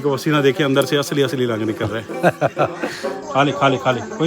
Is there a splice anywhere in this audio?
yes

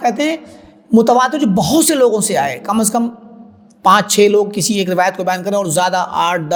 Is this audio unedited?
yes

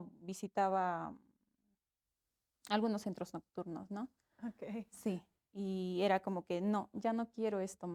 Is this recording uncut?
yes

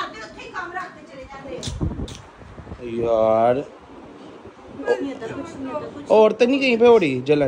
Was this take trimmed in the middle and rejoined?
no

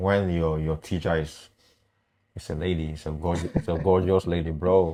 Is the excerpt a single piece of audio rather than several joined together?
yes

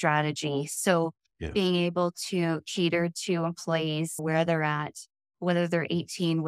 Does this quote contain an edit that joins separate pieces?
yes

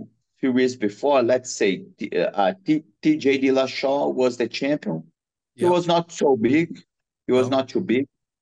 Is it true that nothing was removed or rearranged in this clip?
yes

